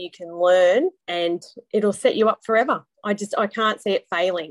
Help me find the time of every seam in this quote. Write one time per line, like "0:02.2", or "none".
0:01.0

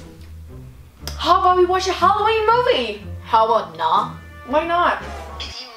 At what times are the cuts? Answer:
0:01.1

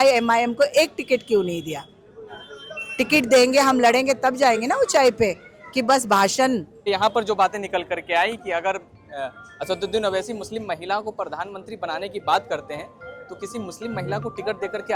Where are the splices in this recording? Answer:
0:06.8

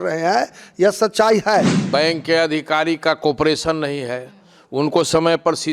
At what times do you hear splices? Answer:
0:01.8

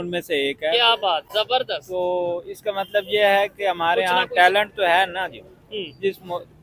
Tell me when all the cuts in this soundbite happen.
none

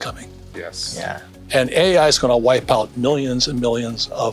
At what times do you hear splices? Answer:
none

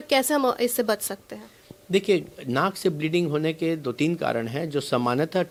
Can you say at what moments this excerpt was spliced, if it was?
none

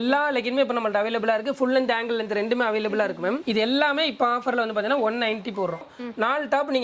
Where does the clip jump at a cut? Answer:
0:03.4
0:05.8

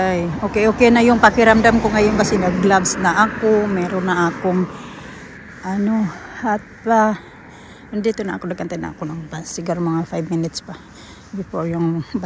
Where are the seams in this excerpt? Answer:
none

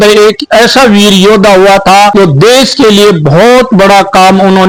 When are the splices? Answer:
none

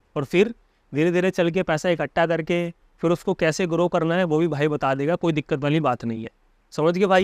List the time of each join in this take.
none

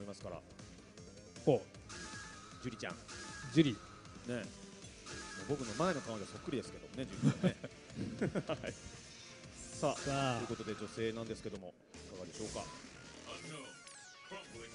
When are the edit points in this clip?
0:13.7

